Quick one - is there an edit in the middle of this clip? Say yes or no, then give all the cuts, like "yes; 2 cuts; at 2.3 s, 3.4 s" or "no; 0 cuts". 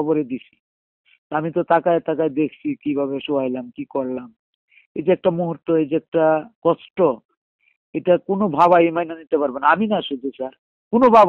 no; 0 cuts